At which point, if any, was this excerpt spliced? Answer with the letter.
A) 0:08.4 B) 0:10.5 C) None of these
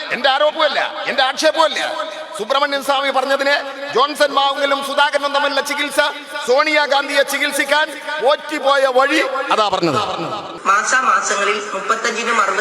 B